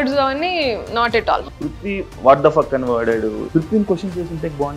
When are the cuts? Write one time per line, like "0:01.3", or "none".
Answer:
0:01.4
0:03.4